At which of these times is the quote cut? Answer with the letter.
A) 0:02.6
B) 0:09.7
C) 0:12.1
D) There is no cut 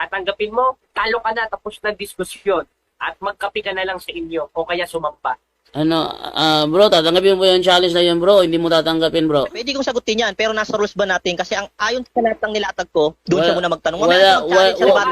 B